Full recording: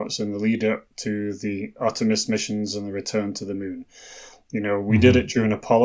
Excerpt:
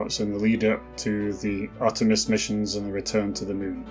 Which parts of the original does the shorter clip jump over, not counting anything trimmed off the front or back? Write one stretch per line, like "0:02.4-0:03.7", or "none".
none

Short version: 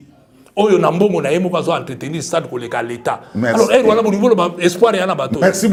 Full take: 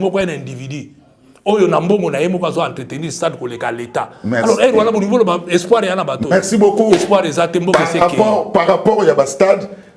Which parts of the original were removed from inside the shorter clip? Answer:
none

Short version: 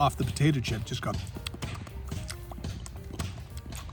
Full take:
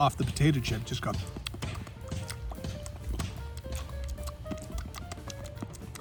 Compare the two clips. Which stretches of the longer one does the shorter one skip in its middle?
none

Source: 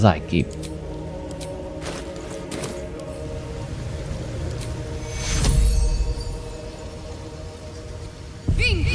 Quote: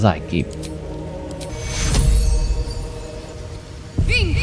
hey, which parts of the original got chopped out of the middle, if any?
0:01.5-0:05.0
0:06.8-0:07.8

